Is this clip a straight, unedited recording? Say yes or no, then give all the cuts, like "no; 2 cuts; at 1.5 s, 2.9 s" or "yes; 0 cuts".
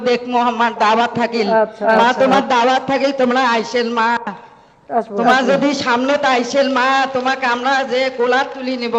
yes; 0 cuts